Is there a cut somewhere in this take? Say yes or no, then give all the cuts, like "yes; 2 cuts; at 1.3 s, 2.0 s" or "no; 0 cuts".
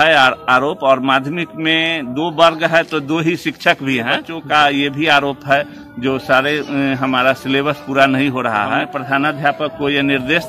yes; 2 cuts; at 4.3 s, 8.9 s